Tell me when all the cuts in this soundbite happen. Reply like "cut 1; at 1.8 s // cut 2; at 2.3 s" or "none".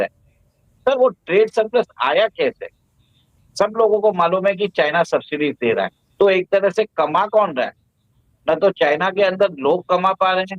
cut 1; at 6.0 s